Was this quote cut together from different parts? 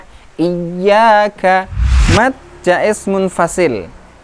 yes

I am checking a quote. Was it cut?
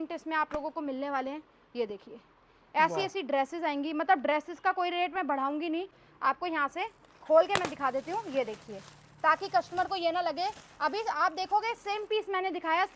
yes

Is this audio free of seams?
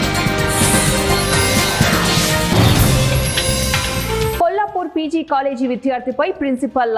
yes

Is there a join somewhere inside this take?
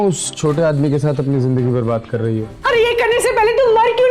yes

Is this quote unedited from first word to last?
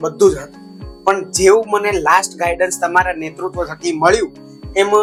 yes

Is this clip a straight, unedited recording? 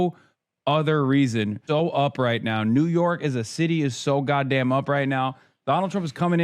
no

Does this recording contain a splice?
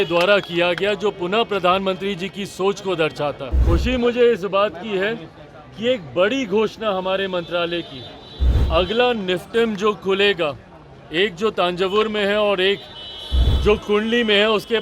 yes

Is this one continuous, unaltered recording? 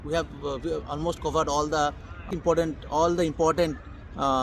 no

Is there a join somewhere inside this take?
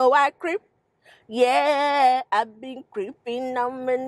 no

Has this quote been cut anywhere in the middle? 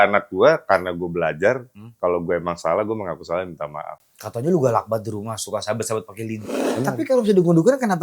yes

